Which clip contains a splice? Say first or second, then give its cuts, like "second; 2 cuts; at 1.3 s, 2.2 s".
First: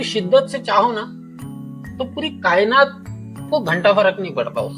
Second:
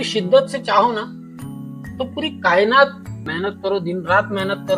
second; 1 cut; at 3.3 s